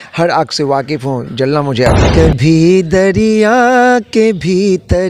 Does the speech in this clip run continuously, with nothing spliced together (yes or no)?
no